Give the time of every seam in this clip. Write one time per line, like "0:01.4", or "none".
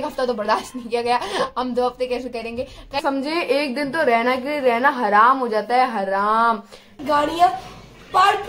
0:03.0
0:07.0